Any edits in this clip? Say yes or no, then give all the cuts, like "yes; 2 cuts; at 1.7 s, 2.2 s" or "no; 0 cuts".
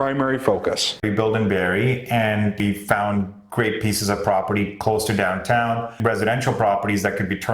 yes; 3 cuts; at 1.0 s, 2.6 s, 5.9 s